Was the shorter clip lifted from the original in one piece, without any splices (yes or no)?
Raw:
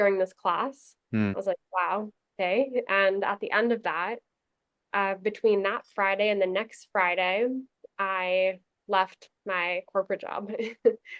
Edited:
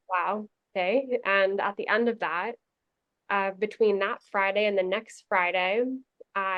yes